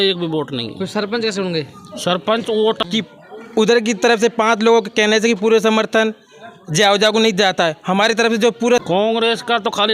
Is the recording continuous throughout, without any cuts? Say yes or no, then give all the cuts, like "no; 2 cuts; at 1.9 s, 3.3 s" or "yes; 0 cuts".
no; 2 cuts; at 2.8 s, 8.8 s